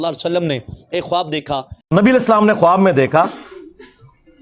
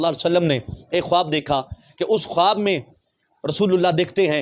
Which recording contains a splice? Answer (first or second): first